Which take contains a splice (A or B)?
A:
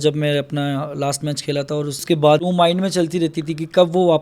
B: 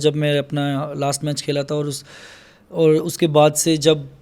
A